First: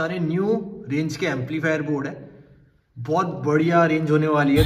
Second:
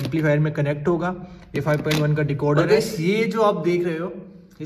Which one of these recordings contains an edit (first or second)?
second